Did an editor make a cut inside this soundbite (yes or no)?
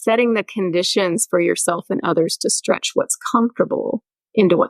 no